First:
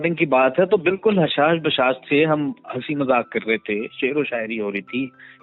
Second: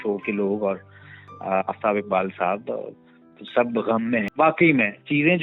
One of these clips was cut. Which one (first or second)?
second